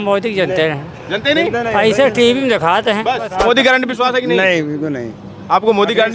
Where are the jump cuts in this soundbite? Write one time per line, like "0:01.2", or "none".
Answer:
0:03.3